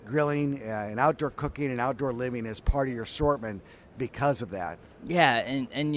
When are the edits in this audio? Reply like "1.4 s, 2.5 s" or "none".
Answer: none